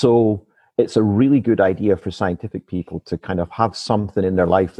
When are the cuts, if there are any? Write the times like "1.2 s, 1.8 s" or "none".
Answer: none